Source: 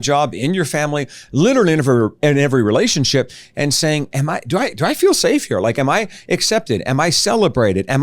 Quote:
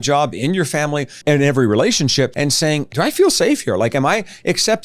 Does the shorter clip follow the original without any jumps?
no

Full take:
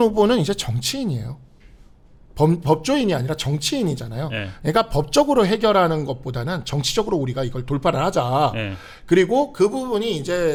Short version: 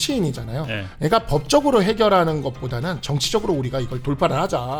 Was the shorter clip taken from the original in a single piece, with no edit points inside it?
yes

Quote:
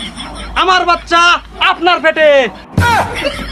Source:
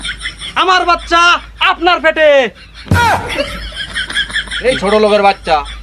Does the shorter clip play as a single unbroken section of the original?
no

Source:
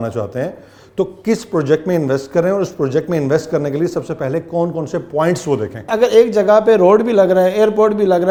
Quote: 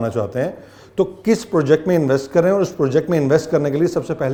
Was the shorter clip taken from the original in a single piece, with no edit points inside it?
yes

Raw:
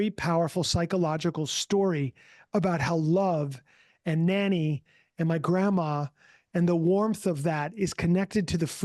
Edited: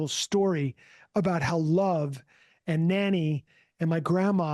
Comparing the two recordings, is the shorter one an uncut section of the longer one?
yes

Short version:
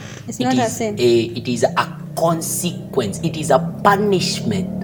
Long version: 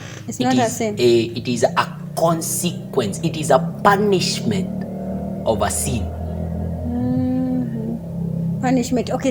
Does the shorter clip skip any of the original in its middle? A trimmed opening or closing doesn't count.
no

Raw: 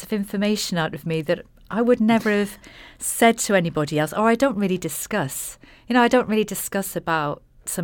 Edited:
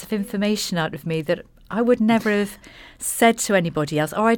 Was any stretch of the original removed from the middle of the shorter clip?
no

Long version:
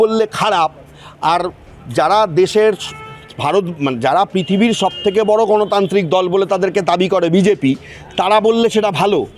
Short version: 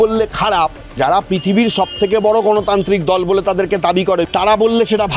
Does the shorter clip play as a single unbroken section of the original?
no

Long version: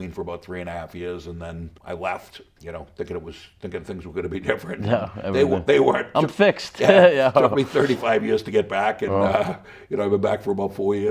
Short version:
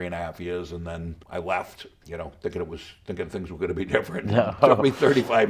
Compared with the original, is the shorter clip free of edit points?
no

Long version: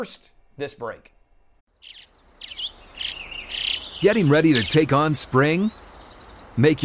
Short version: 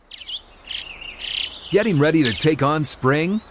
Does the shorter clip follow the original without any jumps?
yes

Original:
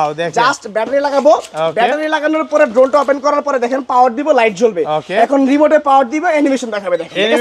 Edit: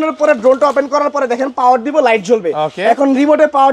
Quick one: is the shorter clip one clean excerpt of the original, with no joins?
yes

